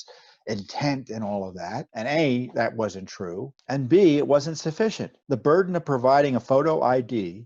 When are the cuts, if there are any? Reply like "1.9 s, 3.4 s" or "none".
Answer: 1.9 s, 3.5 s, 5.1 s, 6.4 s